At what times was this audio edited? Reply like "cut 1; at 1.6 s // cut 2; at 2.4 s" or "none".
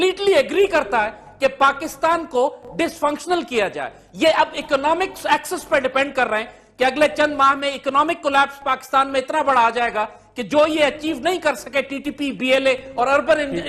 none